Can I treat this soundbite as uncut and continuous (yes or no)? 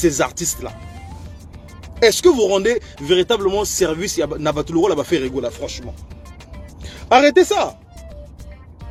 yes